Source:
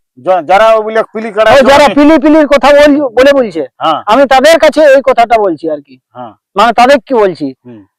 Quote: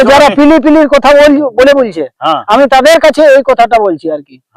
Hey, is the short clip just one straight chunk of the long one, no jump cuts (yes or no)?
yes